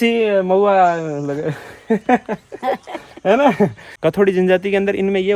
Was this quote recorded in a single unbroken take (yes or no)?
no